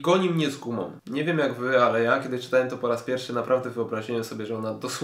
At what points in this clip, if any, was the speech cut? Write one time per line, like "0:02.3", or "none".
none